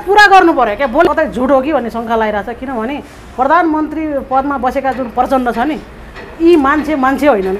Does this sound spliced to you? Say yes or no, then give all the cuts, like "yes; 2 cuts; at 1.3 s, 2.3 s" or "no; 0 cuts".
yes; 1 cut; at 1.0 s